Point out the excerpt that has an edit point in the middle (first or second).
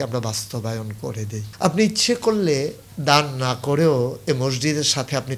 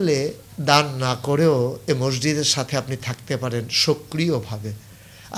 first